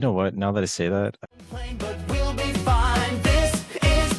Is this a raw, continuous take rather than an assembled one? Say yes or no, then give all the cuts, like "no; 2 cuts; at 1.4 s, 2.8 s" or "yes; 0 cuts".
no; 1 cut; at 1.2 s